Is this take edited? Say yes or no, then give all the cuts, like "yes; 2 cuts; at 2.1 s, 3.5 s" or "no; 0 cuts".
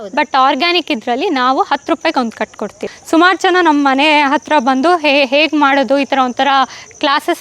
yes; 1 cut; at 2.9 s